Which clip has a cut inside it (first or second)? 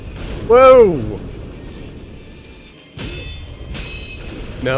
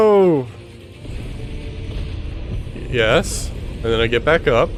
first